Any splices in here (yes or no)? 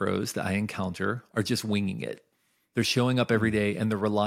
yes